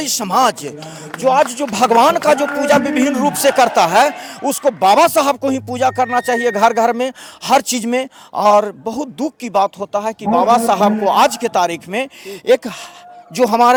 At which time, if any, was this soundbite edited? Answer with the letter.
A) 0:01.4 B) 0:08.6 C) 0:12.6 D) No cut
D